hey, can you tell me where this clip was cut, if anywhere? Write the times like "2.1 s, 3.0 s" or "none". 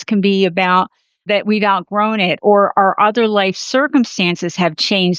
1.3 s, 2.4 s